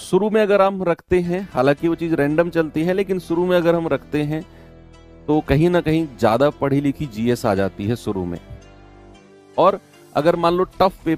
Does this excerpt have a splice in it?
no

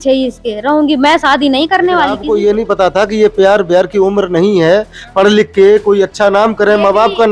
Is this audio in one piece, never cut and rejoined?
no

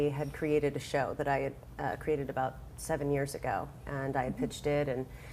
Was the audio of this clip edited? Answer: no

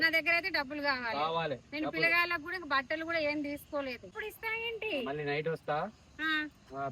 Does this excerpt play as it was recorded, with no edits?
no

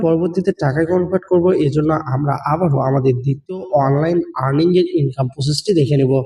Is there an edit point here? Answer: no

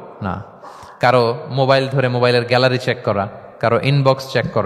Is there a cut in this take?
yes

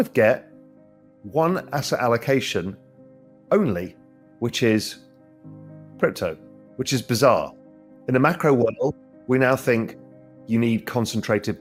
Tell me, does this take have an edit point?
no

